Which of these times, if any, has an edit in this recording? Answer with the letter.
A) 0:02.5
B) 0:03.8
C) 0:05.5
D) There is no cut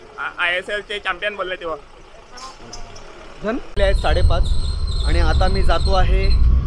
B